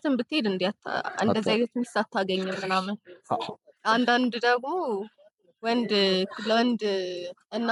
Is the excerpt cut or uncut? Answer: uncut